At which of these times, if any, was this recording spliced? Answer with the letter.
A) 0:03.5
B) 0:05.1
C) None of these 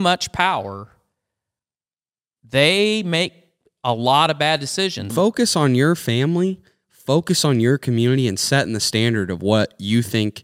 B